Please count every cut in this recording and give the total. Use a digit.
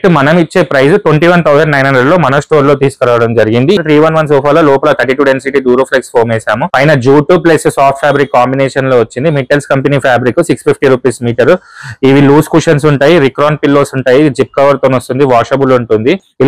1